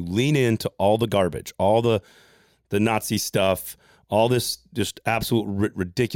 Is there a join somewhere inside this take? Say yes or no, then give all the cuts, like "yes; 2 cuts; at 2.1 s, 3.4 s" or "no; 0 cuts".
no; 0 cuts